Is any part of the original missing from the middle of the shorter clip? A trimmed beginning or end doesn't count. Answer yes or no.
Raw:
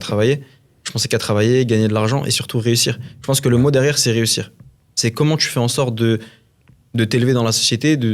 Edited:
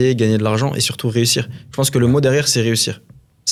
no